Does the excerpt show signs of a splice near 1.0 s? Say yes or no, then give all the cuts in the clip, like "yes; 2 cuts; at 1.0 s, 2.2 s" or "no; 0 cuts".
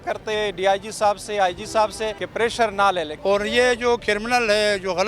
no; 2 cuts; at 2.2 s, 3.1 s